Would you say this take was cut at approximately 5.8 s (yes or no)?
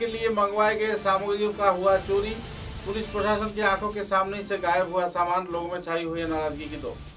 no